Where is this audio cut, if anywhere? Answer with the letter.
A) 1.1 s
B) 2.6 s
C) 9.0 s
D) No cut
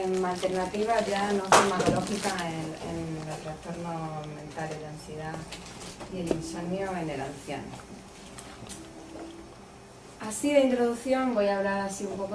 A